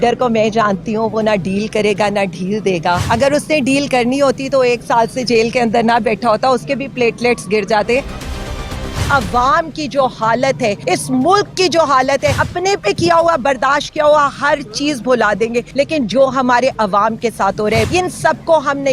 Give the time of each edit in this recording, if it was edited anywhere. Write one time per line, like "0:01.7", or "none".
0:03.0
0:08.6
0:10.8
0:12.4
0:15.7
0:17.9